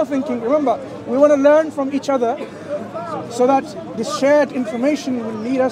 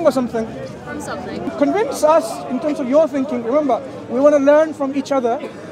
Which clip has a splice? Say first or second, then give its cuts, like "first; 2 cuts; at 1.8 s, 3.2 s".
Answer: second; 1 cut; at 1.5 s